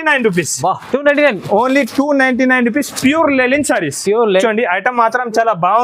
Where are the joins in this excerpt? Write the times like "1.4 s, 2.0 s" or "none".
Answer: 4.4 s